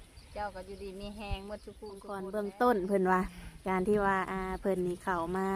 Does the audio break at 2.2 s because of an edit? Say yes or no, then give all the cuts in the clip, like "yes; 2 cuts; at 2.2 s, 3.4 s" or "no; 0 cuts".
yes; 1 cut; at 2.2 s